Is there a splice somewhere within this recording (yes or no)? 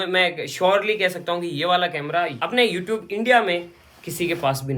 no